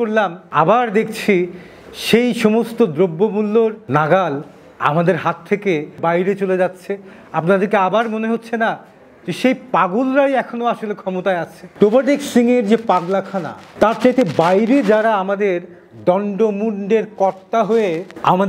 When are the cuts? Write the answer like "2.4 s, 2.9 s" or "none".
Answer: 6.0 s, 11.6 s